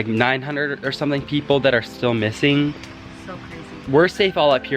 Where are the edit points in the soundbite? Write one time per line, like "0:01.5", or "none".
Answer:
none